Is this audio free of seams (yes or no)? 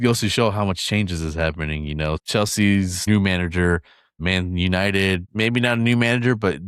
no